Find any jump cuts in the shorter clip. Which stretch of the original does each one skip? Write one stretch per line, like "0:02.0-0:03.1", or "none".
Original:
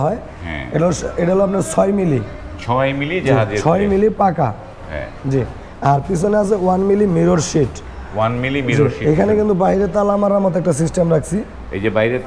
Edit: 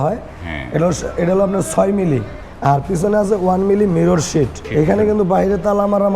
0:02.4-0:05.6
0:07.9-0:09.0